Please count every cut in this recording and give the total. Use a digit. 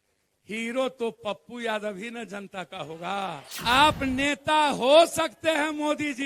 1